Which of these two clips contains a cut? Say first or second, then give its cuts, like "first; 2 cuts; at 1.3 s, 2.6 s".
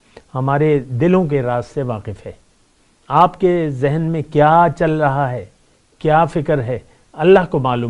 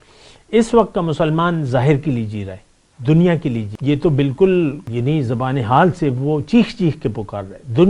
second; 2 cuts; at 3.7 s, 4.9 s